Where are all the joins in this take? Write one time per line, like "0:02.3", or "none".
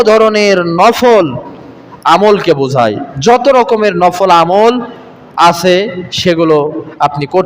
none